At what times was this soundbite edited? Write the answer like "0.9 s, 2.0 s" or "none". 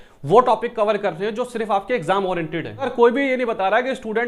2.9 s